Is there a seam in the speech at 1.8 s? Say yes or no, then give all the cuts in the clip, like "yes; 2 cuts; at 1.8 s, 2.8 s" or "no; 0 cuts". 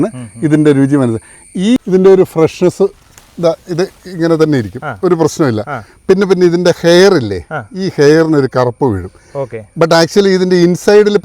yes; 1 cut; at 1.8 s